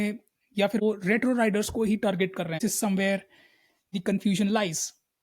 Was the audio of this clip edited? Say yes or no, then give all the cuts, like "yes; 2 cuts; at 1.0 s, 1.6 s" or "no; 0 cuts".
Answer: yes; 2 cuts; at 0.8 s, 2.6 s